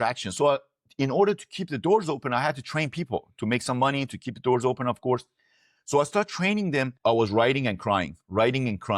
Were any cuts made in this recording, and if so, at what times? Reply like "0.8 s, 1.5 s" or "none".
6.9 s